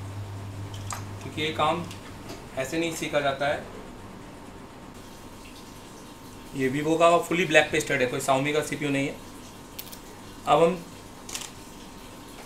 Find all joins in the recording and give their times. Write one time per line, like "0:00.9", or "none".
0:04.9